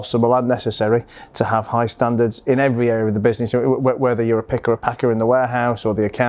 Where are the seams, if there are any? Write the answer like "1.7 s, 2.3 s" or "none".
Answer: none